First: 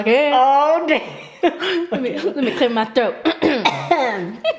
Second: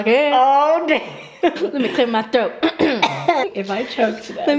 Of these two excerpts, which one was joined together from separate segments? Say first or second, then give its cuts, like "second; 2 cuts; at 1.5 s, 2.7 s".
second; 2 cuts; at 1.6 s, 3.5 s